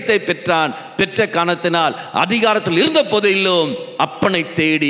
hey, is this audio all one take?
yes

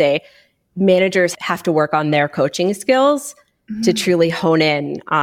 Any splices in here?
yes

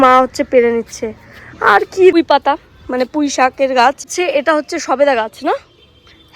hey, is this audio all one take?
no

